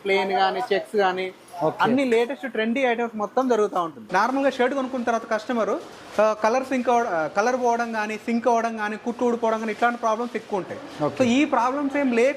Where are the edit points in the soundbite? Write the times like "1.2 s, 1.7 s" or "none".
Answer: 4.0 s